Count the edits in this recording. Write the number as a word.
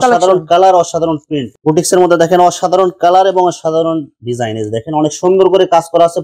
one